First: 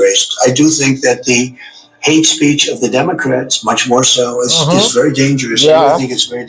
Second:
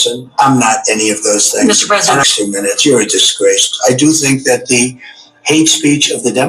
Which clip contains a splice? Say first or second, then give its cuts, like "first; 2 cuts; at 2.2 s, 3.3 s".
second; 1 cut; at 2.2 s